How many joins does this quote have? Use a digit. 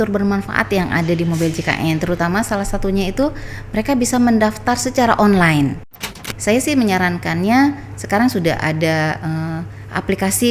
1